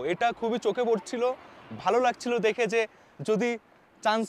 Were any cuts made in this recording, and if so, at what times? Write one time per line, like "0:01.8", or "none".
none